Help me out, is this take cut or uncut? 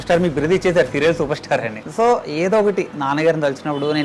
cut